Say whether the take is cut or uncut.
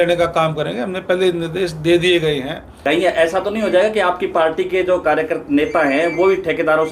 cut